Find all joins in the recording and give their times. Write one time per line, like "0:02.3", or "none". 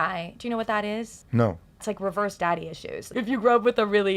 0:01.8
0:03.1

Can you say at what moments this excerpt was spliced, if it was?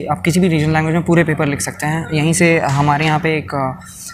none

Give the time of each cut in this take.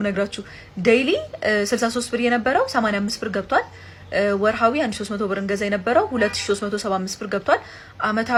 none

